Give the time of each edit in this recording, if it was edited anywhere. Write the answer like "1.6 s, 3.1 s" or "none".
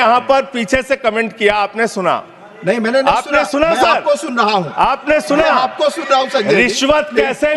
none